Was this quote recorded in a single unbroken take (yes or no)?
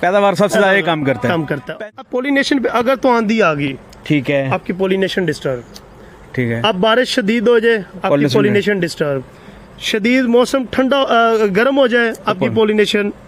no